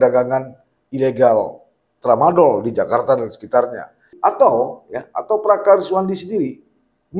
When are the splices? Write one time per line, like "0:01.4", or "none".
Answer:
0:04.1